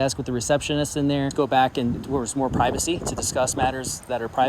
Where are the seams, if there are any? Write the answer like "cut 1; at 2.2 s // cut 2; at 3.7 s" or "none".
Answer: cut 1; at 1.3 s

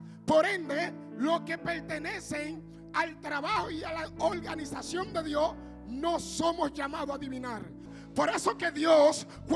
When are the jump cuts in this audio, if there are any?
cut 1; at 7.9 s

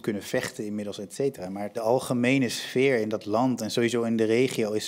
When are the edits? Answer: cut 1; at 1.8 s

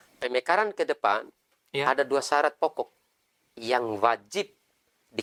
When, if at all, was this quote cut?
none

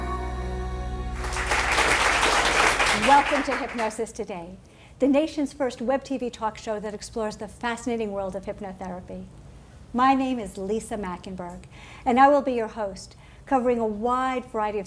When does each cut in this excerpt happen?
cut 1; at 2.6 s

